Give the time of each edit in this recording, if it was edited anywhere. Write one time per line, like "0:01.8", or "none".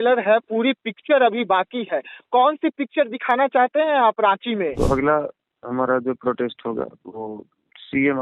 0:04.7